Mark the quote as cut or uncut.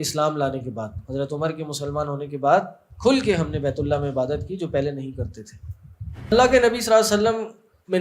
cut